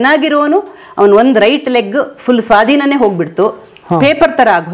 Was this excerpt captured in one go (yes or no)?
yes